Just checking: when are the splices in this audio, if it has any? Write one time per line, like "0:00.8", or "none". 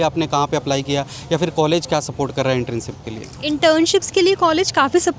none